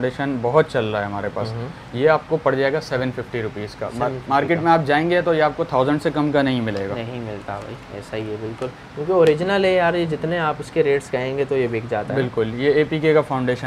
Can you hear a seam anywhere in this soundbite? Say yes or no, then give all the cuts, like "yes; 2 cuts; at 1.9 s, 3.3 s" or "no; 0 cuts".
no; 0 cuts